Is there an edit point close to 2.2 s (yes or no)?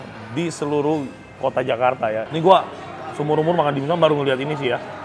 yes